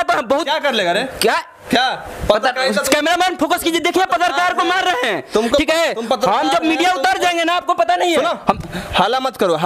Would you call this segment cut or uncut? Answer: uncut